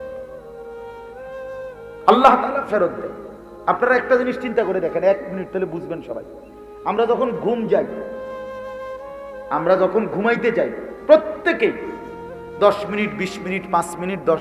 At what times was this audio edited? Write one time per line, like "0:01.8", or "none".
none